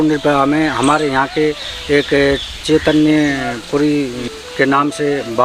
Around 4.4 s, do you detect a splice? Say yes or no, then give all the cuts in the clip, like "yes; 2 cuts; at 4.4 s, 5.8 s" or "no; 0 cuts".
yes; 1 cut; at 4.4 s